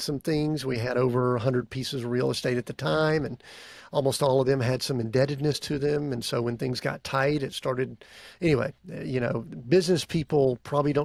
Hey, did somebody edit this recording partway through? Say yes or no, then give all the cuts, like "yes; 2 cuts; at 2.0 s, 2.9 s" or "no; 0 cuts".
no; 0 cuts